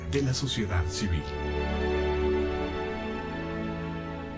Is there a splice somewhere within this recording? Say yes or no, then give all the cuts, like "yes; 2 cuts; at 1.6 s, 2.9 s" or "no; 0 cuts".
no; 0 cuts